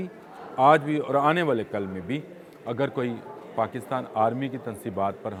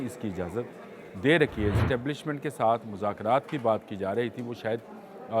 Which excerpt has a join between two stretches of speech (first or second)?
second